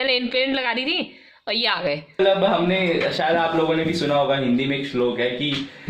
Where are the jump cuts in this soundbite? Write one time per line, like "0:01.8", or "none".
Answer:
0:02.2